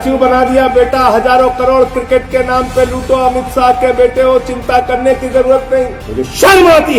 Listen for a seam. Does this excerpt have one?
yes; 1 cut; at 6.0 s

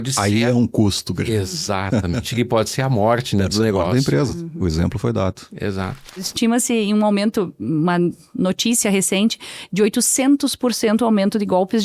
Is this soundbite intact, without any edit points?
no; 1 cut; at 6.3 s

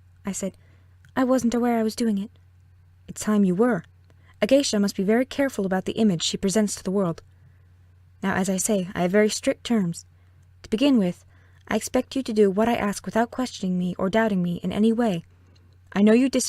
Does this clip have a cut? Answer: yes; 1 cut; at 11.8 s

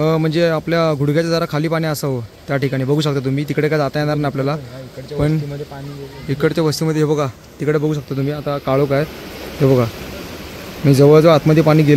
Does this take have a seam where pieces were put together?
no; 0 cuts

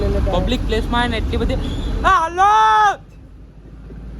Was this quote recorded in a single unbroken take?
yes; 0 cuts

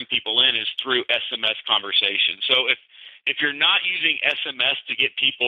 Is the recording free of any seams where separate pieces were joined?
yes; 0 cuts

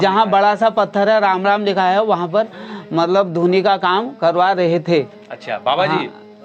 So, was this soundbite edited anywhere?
no; 0 cuts

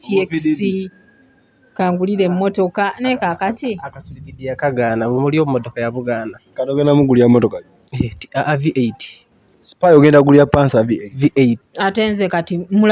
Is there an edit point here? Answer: yes; 1 cut; at 11.7 s

